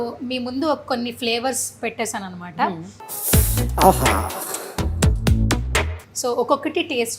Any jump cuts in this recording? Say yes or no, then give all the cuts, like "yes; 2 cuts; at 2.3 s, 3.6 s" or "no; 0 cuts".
no; 0 cuts